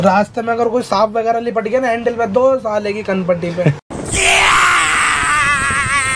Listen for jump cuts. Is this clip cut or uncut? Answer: uncut